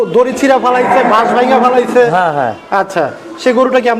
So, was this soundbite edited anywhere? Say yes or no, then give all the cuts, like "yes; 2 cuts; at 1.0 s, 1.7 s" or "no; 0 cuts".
no; 0 cuts